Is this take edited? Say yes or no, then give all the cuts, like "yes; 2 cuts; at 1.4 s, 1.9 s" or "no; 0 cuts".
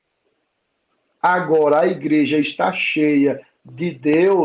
no; 0 cuts